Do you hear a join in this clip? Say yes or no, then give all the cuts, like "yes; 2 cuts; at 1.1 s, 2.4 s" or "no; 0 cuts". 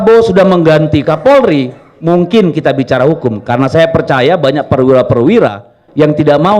no; 0 cuts